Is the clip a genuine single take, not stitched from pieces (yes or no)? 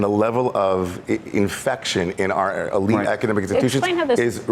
yes